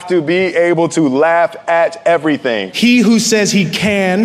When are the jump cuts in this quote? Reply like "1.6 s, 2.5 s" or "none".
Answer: 2.7 s